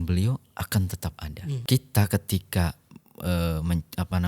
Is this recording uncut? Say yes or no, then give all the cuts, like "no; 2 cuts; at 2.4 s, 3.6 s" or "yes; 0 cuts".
no; 1 cut; at 1.6 s